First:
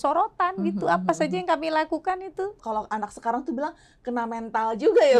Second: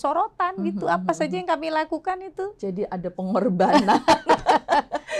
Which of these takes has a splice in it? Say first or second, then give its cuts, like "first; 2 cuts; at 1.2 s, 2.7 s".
first; 1 cut; at 2.6 s